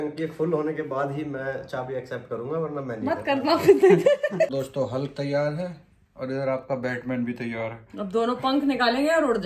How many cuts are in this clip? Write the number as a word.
one